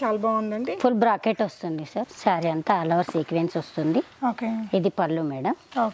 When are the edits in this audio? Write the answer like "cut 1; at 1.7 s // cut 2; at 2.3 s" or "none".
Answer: cut 1; at 2.1 s